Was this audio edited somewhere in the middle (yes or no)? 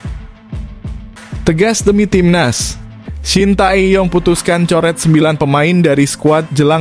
yes